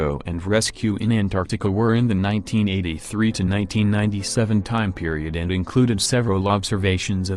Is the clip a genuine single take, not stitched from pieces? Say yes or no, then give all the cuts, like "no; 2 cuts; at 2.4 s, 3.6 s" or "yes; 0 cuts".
no; 1 cut; at 1.4 s